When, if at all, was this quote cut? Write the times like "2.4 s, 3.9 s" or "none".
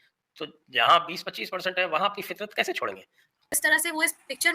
3.5 s